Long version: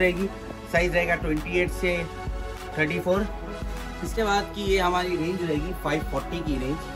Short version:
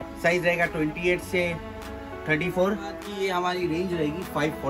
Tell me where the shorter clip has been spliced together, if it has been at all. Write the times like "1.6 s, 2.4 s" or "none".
3.0 s